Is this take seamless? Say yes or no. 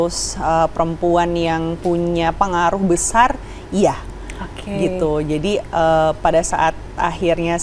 yes